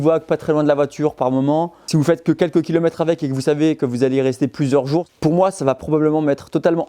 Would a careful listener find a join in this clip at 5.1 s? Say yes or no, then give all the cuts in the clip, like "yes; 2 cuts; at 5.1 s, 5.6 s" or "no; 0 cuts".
yes; 1 cut; at 5.1 s